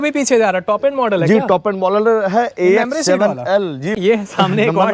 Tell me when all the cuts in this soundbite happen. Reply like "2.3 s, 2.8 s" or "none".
4.0 s